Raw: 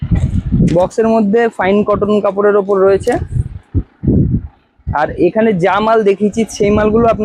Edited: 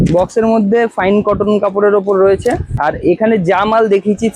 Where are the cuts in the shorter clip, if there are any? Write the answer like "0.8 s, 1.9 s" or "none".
2.7 s

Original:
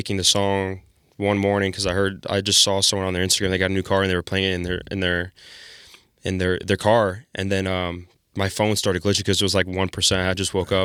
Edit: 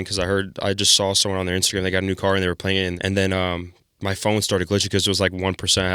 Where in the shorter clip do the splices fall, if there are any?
3.0 s

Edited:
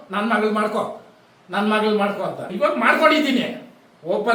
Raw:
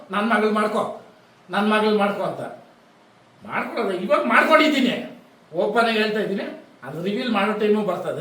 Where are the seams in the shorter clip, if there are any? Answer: 2.5 s

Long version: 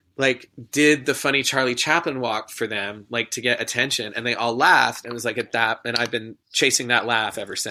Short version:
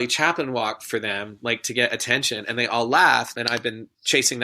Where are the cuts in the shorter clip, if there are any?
3.3 s

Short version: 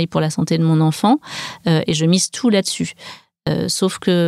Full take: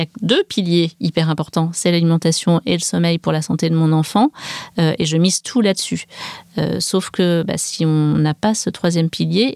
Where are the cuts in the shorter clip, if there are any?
none

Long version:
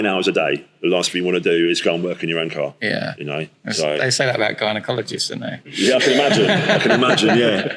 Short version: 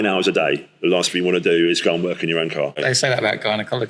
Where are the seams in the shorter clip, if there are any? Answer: 2.8 s

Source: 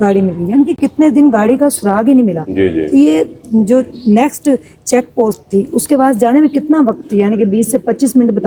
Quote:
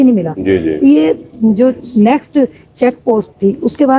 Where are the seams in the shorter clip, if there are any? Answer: none

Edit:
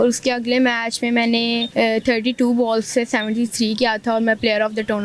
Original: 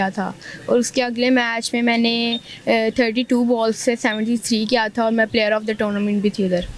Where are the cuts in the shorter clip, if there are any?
1.7 s

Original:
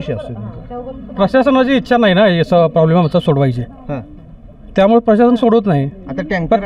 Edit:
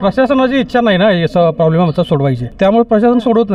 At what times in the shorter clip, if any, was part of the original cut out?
2.5 s

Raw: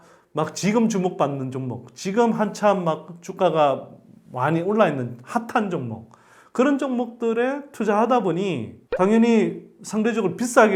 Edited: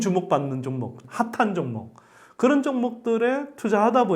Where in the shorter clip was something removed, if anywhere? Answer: 1.0 s

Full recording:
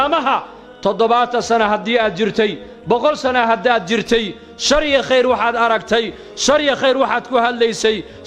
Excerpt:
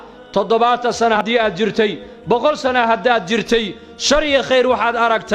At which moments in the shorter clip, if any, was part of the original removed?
1.2 s

